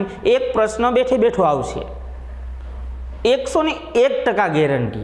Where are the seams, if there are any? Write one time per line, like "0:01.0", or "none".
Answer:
none